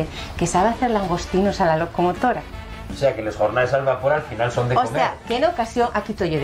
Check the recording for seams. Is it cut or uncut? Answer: uncut